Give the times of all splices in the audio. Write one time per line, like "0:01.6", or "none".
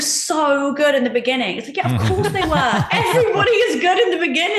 none